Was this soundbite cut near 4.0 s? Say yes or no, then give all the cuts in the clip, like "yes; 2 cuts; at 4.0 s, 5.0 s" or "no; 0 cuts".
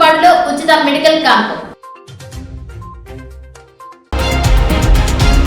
yes; 1 cut; at 4.0 s